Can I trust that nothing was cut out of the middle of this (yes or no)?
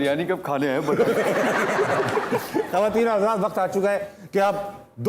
yes